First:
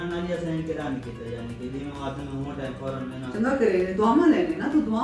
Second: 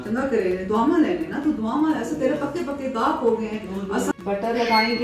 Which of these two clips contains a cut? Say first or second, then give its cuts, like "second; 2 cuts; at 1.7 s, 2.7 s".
second; 1 cut; at 4.1 s